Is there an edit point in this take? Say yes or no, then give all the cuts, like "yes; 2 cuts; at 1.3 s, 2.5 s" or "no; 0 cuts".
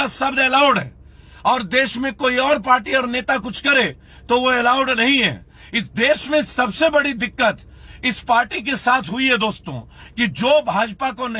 no; 0 cuts